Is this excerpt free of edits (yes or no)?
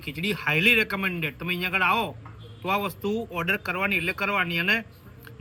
yes